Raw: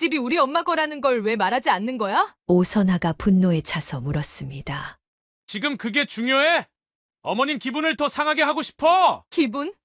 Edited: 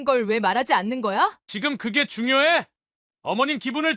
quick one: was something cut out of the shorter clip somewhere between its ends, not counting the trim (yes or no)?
yes